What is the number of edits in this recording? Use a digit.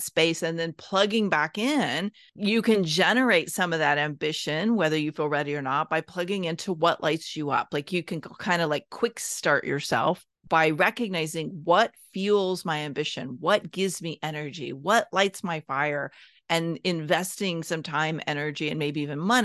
2